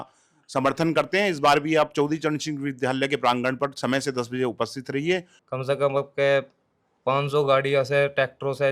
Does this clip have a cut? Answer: yes; 1 cut; at 5.4 s

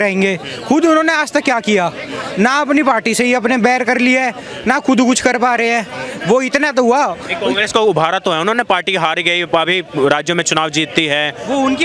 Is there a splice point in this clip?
no; 0 cuts

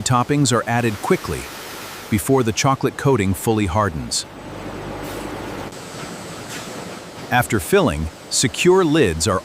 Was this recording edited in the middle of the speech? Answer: yes; 1 cut; at 5.7 s

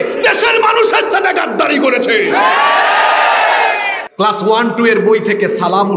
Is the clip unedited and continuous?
no; 1 cut; at 4.0 s

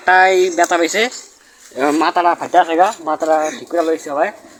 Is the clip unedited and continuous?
yes; 0 cuts

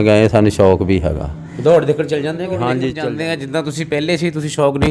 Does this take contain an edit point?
yes; 1 cut; at 3.1 s

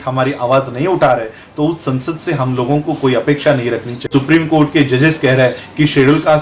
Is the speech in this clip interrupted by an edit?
yes; 1 cut; at 4.1 s

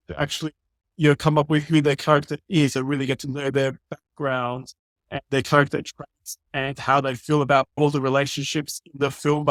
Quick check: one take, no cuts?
yes; 0 cuts

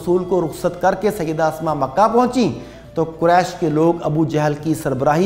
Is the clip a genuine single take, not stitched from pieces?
yes; 0 cuts

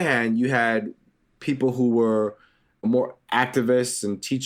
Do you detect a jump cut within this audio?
no; 0 cuts

